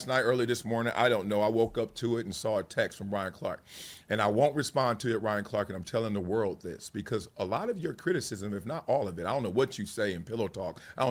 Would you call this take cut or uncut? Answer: uncut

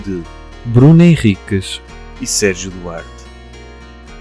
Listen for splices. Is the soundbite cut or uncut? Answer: cut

